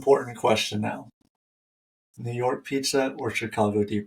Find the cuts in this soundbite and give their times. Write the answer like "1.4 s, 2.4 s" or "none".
none